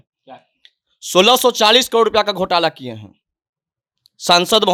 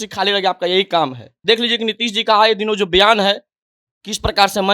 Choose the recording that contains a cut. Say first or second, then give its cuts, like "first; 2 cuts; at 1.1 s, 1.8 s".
second; 1 cut; at 1.4 s